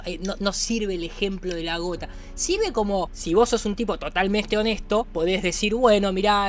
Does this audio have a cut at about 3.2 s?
yes; 2 cuts; at 3.2 s, 5.1 s

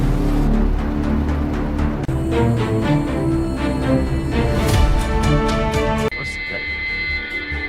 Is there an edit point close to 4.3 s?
no; 1 cut; at 2.1 s

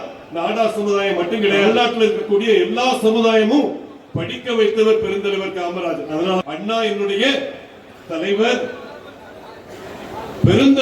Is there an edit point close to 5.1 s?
no; 2 cuts; at 1.6 s, 6.4 s

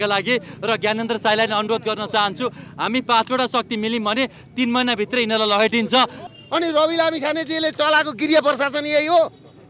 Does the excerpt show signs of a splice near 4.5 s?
no; 1 cut; at 6.2 s

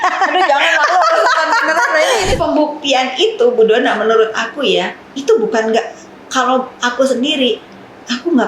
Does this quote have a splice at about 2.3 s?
yes; 1 cut; at 2.3 s

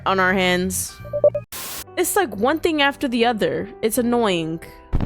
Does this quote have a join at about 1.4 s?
yes; 1 cut; at 1.4 s

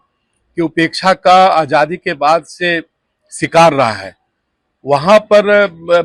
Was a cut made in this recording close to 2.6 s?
no; 0 cuts

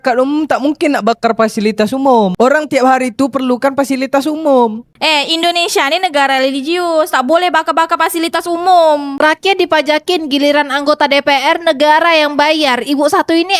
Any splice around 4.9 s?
no; 0 cuts

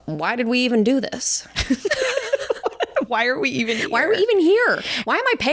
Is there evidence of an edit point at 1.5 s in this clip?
no; 0 cuts

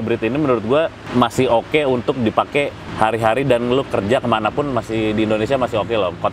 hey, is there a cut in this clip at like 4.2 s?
no; 2 cuts; at 1.0 s, 2.8 s

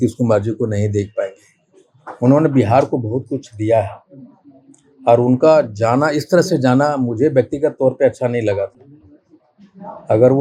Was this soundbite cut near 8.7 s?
no; 0 cuts

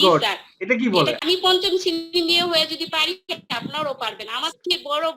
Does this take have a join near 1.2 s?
yes; 1 cut; at 1.2 s

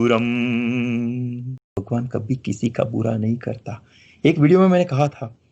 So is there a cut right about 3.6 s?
no; 1 cut; at 1.8 s

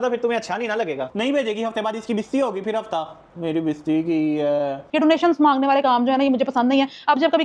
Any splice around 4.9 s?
yes; 2 cuts; at 1.1 s, 4.9 s

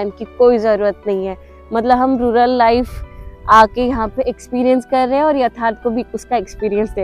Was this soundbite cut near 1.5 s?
no; 0 cuts

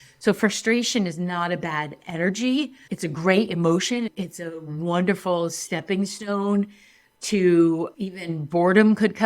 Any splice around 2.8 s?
yes; 2 cuts; at 2.8 s, 4.1 s

